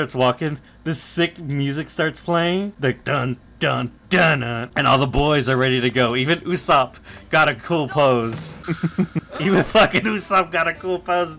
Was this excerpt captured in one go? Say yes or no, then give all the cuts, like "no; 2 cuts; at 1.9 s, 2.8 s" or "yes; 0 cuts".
no; 3 cuts; at 2.7 s, 4.7 s, 8.5 s